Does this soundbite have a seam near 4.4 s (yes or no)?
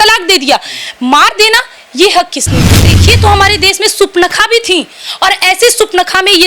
no